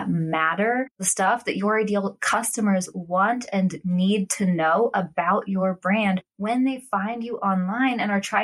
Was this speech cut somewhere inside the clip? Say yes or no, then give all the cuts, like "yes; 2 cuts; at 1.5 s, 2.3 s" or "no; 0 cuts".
yes; 1 cut; at 0.9 s